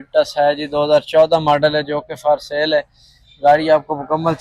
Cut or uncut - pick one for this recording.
uncut